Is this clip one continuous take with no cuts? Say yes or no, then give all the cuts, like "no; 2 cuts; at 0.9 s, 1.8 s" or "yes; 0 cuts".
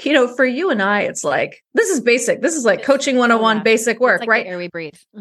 no; 1 cut; at 1.6 s